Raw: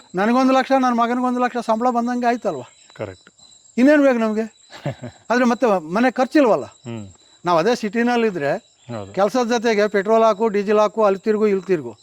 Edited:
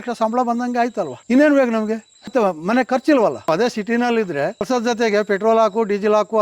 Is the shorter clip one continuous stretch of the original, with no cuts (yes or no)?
no